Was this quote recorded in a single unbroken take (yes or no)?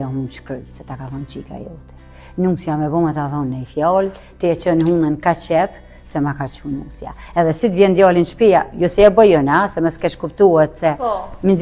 yes